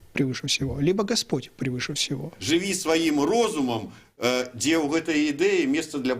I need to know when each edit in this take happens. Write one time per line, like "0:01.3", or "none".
0:02.3